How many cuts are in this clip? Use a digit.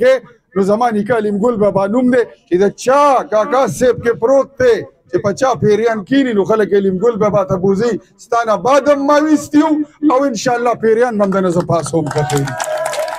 0